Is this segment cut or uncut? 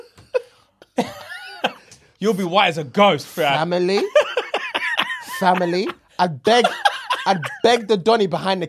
uncut